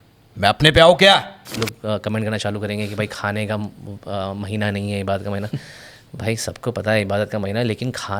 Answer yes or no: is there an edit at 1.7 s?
yes